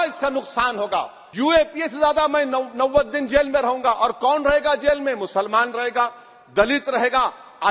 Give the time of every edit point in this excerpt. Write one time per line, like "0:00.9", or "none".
0:01.2